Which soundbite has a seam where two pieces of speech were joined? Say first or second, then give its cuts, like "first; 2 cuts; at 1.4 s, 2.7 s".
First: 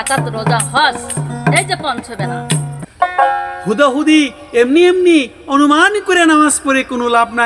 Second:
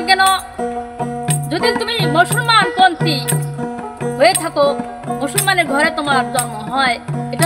first; 1 cut; at 2.8 s